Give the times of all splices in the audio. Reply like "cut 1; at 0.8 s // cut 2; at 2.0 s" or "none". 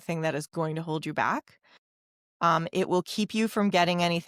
none